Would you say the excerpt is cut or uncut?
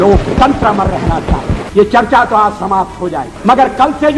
cut